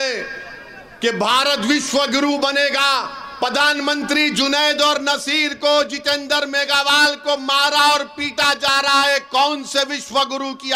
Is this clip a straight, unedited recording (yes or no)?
yes